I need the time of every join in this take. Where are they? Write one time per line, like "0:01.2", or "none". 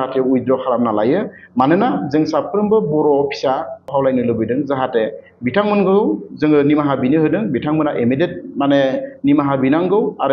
0:03.9